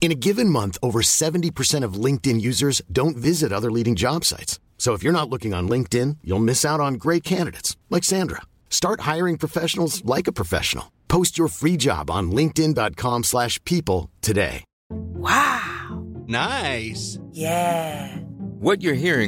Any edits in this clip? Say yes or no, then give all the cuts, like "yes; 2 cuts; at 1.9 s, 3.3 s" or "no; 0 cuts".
no; 0 cuts